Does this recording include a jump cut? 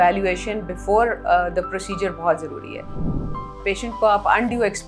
yes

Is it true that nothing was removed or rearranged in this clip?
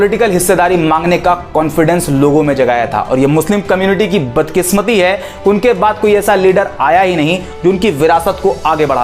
yes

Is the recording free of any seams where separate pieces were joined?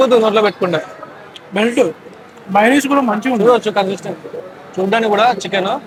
yes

